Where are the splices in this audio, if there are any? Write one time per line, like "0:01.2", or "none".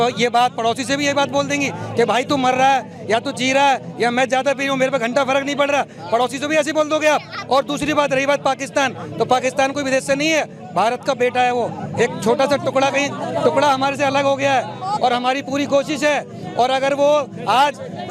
none